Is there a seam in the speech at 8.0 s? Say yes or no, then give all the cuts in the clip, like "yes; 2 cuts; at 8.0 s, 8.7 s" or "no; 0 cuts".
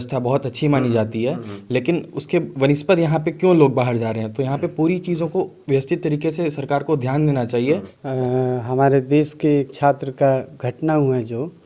yes; 1 cut; at 8.0 s